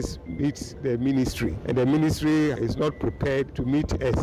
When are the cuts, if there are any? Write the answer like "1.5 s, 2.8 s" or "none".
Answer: 1.6 s, 3.0 s